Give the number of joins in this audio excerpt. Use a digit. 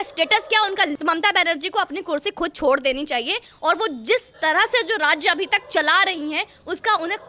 1